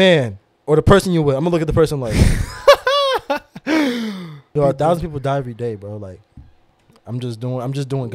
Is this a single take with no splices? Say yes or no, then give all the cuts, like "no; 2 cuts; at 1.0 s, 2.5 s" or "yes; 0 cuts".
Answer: no; 1 cut; at 4.5 s